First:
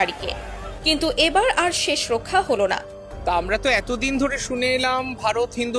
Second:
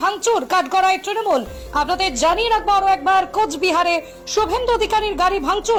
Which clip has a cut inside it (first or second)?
first